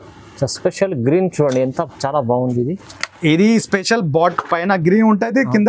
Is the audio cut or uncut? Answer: uncut